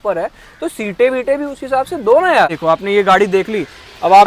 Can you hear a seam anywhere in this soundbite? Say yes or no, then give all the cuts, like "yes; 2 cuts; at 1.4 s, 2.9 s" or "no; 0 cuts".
yes; 1 cut; at 2.5 s